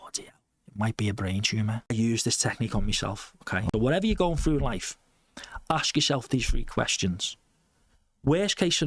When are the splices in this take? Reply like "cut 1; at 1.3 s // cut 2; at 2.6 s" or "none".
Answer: cut 1; at 1.9 s // cut 2; at 3.7 s